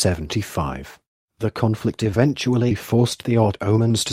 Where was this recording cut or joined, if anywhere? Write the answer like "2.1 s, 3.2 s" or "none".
2.1 s